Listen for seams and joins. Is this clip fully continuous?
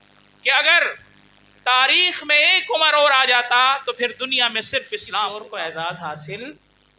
no; 1 cut; at 5.3 s

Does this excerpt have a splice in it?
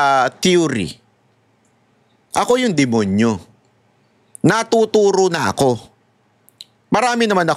no; 0 cuts

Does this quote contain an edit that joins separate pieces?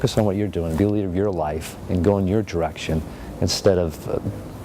no; 0 cuts

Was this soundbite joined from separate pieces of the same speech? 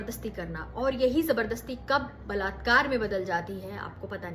no; 0 cuts

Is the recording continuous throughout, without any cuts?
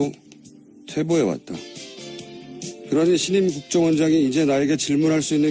no; 1 cut; at 4.3 s

